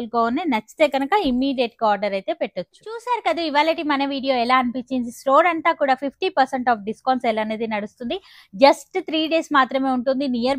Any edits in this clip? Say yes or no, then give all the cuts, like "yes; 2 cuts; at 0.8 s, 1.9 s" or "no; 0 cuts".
no; 0 cuts